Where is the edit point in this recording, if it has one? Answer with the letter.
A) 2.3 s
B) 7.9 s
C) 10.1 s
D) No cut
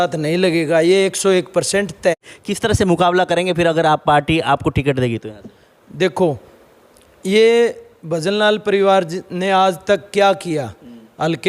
A